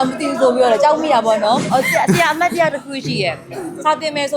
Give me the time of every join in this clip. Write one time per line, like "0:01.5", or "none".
0:01.6